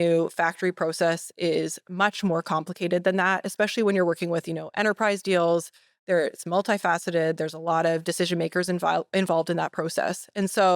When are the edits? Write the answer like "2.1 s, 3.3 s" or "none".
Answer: none